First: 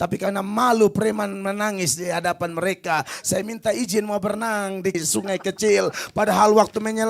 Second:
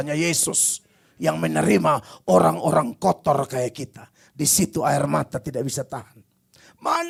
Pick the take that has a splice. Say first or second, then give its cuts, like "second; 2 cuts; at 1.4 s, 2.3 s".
first; 1 cut; at 5.0 s